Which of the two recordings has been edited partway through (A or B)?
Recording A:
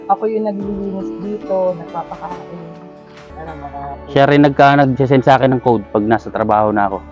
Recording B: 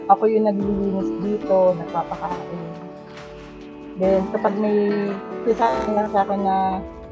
A